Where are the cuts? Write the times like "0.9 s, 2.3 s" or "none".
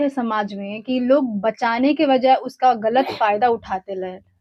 none